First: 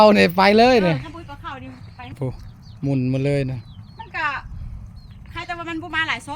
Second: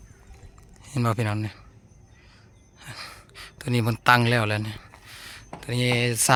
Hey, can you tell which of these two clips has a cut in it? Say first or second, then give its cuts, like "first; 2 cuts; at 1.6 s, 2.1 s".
first; 1 cut; at 2.2 s